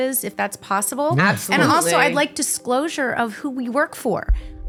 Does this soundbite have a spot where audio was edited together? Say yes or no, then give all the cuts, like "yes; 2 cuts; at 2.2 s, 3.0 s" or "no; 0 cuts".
no; 0 cuts